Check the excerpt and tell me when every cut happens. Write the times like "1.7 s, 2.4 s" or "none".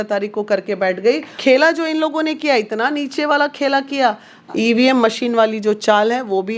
1.4 s, 4.3 s